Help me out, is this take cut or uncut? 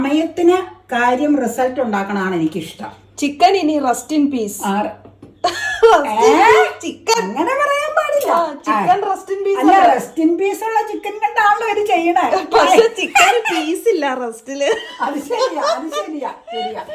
uncut